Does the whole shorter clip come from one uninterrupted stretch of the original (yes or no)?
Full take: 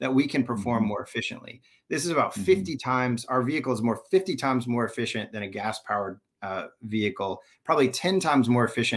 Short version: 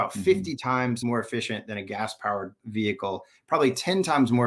no